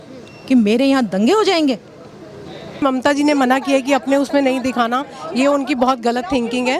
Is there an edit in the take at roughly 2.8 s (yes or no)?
yes